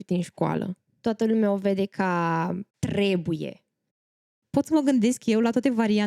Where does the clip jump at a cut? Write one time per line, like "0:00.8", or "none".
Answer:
0:00.8
0:02.7
0:04.1